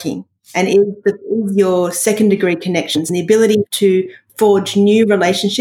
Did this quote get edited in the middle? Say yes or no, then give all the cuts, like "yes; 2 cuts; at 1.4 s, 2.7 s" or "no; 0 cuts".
yes; 1 cut; at 3.7 s